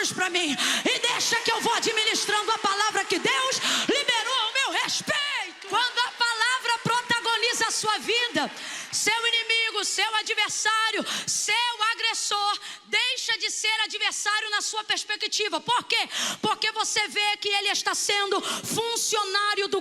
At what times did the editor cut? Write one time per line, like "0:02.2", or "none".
0:05.6